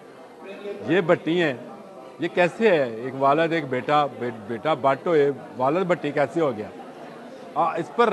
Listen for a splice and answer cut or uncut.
uncut